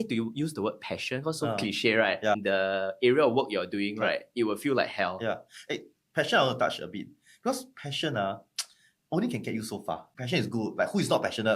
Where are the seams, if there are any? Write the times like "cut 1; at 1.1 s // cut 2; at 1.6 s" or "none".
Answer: cut 1; at 2.4 s // cut 2; at 10.1 s

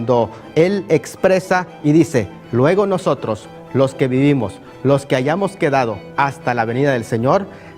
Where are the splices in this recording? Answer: cut 1; at 1.1 s

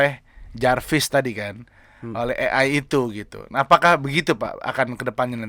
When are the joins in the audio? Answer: none

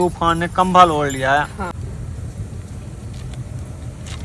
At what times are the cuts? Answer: cut 1; at 1.7 s

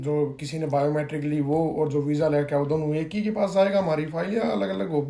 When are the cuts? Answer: none

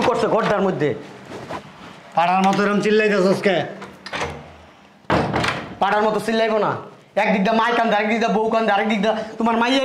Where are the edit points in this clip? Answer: none

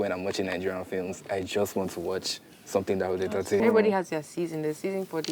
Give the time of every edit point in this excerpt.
cut 1; at 3.6 s

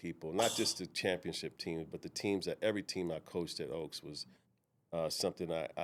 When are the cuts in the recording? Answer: none

